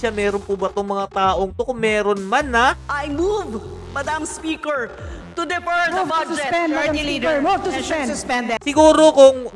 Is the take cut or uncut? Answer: cut